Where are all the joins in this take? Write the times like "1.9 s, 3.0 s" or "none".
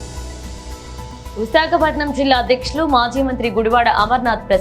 1.1 s